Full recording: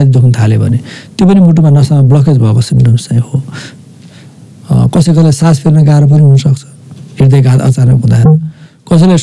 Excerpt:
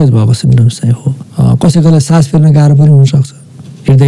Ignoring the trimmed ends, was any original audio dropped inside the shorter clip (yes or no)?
yes